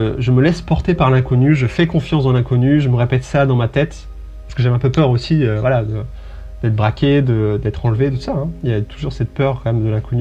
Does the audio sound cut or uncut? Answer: uncut